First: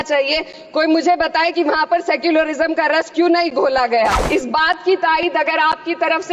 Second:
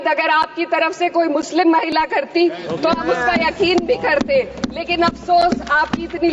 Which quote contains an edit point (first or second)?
first